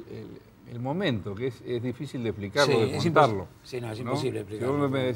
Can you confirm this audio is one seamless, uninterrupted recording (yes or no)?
no